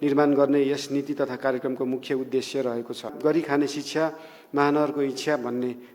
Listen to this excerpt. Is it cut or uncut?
cut